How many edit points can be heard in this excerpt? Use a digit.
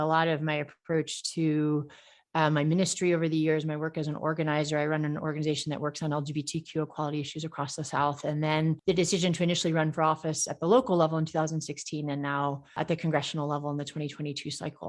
2